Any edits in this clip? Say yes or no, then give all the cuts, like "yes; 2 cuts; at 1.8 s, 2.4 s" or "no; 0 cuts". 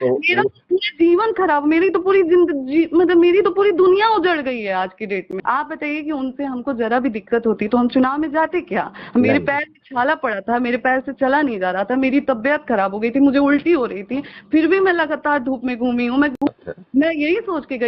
yes; 2 cuts; at 5.3 s, 16.3 s